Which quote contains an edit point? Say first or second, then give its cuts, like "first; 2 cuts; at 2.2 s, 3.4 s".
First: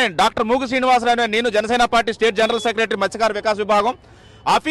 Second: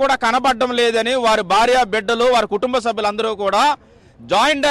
second; 1 cut; at 2.7 s